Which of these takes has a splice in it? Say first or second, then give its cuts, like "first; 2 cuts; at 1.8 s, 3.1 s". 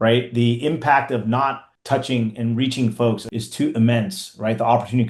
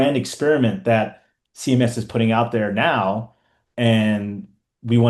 first; 2 cuts; at 1.7 s, 3.4 s